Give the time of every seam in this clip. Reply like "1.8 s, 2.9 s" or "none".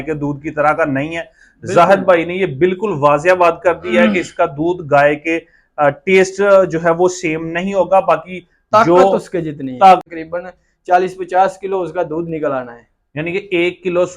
10.0 s

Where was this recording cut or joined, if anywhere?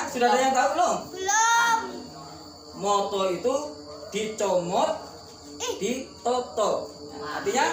none

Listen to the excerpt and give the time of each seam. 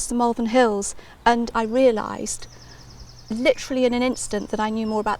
1.5 s

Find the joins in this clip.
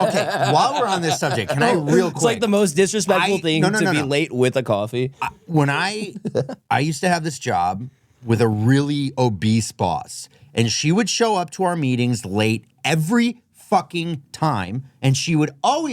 none

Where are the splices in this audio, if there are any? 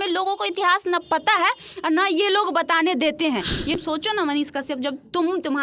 3.8 s

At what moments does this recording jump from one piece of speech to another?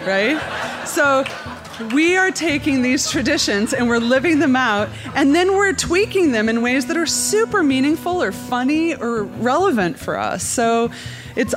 none

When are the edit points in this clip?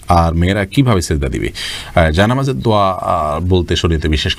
none

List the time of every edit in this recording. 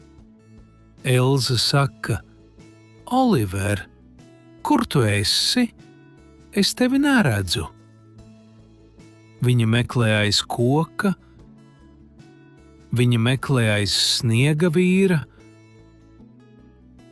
7.7 s, 9.2 s, 11.2 s, 12.7 s

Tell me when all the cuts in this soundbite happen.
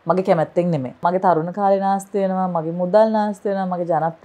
1.0 s

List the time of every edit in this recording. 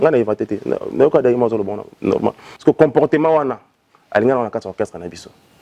2.5 s

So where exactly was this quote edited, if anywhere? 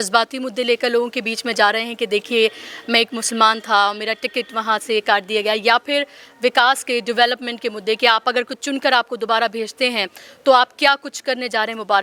none

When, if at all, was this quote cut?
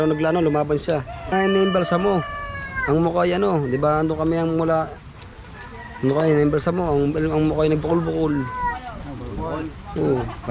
1.3 s

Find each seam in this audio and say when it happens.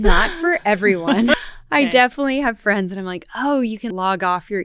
1.3 s, 3.9 s

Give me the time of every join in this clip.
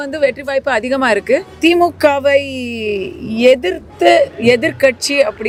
none

